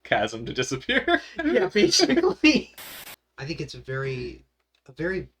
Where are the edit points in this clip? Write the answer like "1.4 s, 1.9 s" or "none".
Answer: 2.8 s

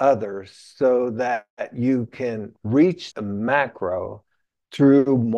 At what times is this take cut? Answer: 3.1 s

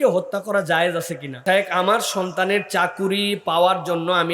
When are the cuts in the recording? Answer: 1.4 s

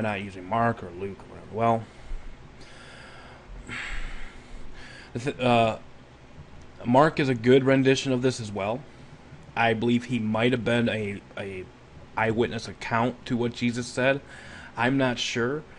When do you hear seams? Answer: 10.3 s

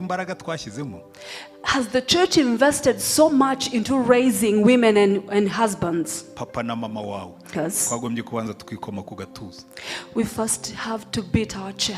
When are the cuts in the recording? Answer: 7.5 s

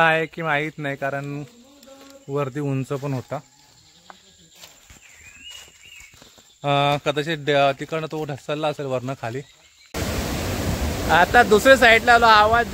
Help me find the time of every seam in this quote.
9.8 s

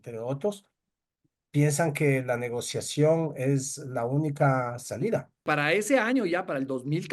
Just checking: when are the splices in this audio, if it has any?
5.4 s

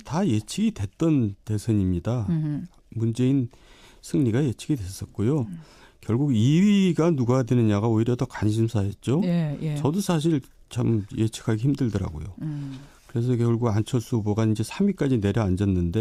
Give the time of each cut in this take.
none

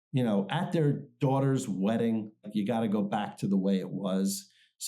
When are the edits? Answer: 2.5 s

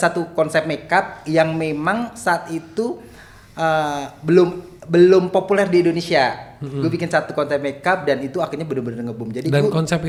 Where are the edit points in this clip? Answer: none

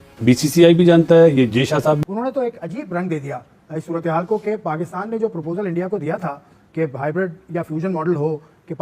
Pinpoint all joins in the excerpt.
2.0 s

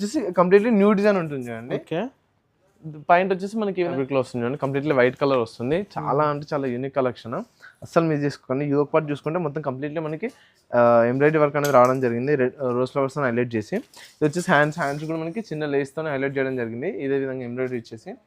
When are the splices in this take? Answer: 4.0 s

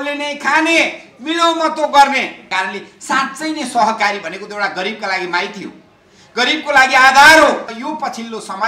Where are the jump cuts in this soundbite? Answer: 2.5 s, 7.8 s

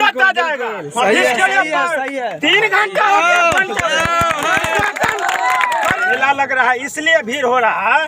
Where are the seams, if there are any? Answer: 6.2 s

